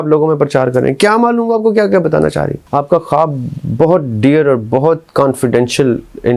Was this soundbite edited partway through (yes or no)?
yes